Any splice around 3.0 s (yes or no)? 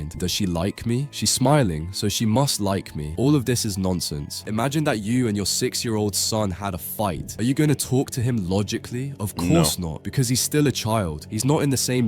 yes